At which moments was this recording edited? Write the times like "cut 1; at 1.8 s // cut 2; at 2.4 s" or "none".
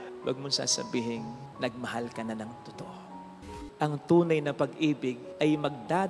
cut 1; at 3.6 s